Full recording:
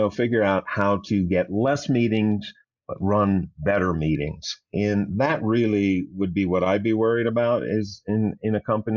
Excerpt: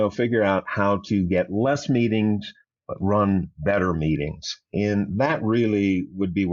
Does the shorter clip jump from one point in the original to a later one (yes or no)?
no